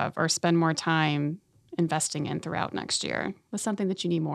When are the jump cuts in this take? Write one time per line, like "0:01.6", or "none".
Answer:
0:03.4